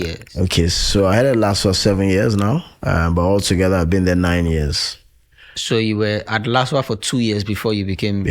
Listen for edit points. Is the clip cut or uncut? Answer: uncut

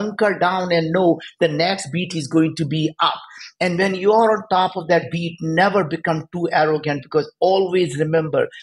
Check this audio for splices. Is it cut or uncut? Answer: uncut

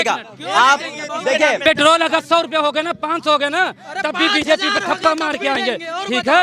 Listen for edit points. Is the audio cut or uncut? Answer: cut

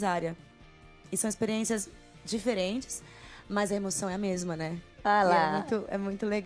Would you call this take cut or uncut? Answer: uncut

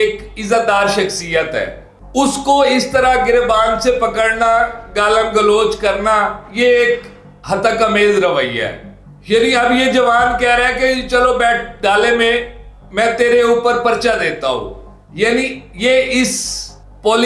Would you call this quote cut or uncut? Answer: uncut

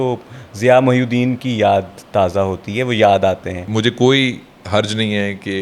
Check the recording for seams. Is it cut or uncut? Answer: cut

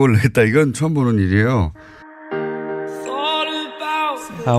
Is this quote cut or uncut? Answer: cut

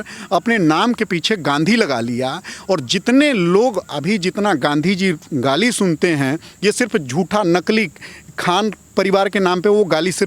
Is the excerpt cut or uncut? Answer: uncut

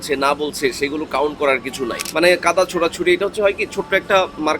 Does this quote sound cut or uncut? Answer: cut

